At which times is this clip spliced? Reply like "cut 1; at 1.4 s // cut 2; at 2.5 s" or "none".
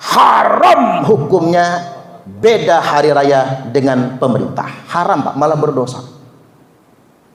none